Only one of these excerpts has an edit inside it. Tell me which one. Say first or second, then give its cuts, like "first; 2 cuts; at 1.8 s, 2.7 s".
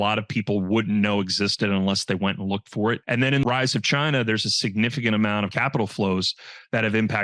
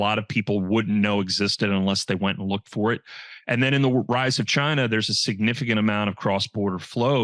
first; 2 cuts; at 3.4 s, 5.5 s